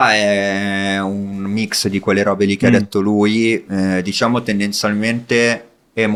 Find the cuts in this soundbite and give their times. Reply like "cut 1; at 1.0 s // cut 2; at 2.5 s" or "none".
none